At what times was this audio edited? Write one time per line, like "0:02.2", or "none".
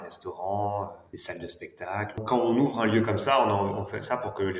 0:01.1
0:02.2